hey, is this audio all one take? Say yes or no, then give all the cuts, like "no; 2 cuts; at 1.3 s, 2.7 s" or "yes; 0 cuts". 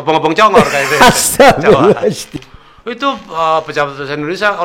no; 1 cut; at 2.2 s